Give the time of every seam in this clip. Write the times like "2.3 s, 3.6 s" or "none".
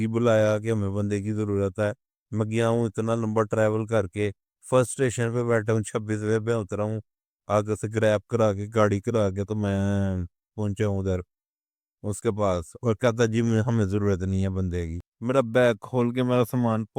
15.1 s